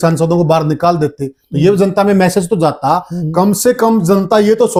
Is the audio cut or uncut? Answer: uncut